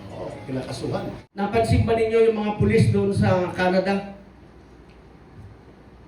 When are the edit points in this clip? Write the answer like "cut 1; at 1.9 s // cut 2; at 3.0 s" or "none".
cut 1; at 1.2 s